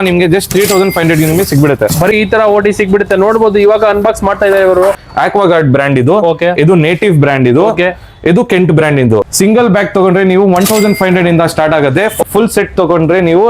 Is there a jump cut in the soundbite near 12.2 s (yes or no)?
yes